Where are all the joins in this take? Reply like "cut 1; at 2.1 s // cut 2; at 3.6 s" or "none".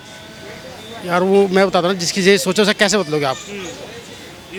none

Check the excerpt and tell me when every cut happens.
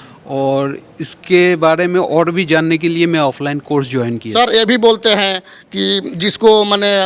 cut 1; at 4.2 s

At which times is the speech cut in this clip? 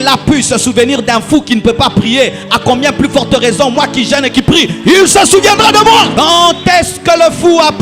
cut 1; at 6.1 s

